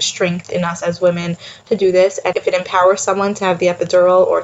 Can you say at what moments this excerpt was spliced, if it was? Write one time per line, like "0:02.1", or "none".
0:02.3

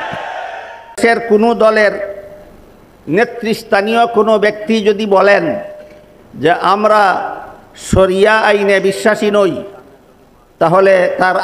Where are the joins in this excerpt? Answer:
0:01.0

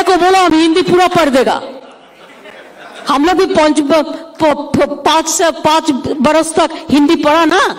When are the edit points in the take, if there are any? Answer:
none

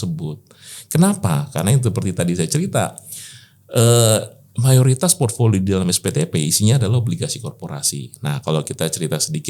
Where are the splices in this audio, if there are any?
none

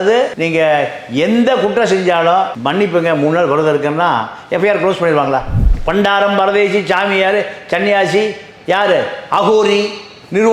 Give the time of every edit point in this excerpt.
0:05.6

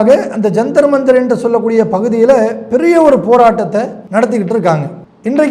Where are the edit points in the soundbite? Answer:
0:04.0

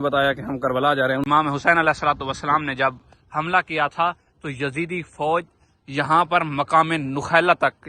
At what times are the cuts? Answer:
0:01.3

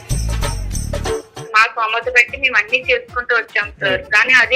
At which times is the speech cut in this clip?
0:01.4

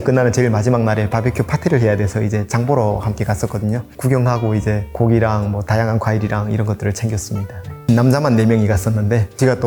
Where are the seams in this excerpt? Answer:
none

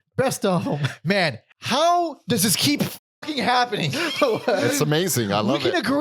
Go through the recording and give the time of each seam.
0:01.5

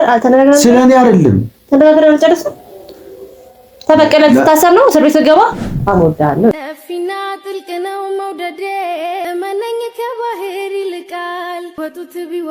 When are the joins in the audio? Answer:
0:05.7

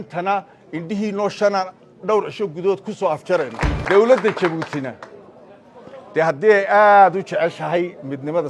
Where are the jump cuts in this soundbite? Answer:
0:03.7

